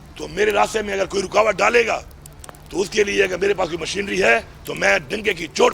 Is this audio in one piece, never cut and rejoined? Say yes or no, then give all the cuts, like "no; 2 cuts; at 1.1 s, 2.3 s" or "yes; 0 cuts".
yes; 0 cuts